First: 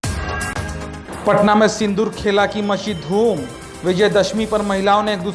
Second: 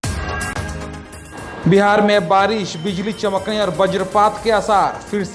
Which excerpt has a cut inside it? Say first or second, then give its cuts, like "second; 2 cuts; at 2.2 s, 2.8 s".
first; 1 cut; at 1.0 s